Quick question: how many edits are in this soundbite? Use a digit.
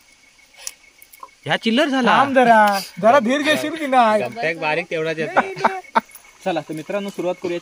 1